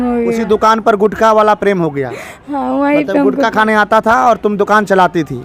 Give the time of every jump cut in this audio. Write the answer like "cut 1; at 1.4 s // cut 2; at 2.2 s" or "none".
none